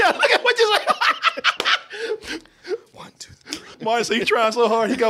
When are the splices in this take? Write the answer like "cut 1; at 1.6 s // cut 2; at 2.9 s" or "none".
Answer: cut 1; at 3.7 s

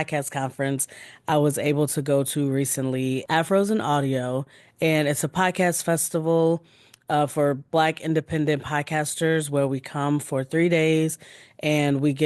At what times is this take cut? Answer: cut 1; at 3.2 s

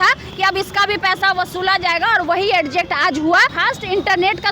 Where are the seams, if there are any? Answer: cut 1; at 3.6 s

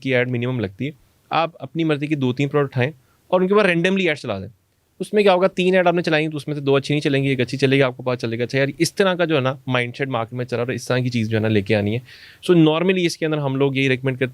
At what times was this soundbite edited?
none

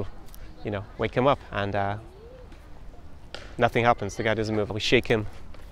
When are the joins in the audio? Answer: cut 1; at 1.5 s // cut 2; at 4.7 s

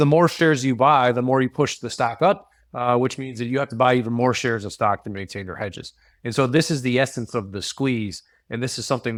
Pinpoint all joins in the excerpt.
none

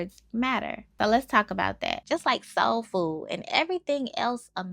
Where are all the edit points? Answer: cut 1; at 2.0 s

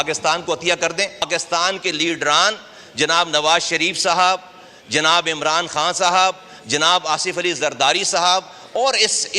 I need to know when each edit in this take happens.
cut 1; at 1.3 s

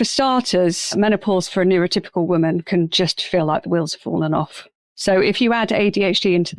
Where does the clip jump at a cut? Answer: cut 1; at 0.9 s

